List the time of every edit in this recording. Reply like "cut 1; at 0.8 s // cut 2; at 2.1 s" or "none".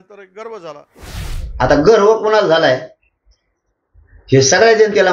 cut 1; at 0.9 s